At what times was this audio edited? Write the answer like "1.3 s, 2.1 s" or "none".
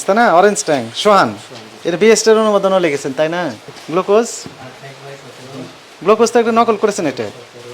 3.7 s